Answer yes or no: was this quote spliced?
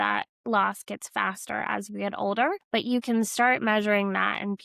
yes